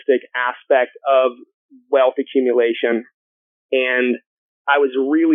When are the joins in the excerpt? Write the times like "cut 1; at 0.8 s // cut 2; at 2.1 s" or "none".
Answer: none